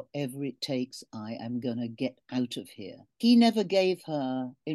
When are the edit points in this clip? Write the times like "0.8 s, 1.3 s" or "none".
3.2 s